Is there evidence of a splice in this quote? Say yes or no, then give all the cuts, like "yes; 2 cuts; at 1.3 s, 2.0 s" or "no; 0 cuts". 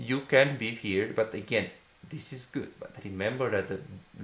no; 0 cuts